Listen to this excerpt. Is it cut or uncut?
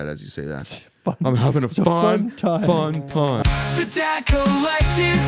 cut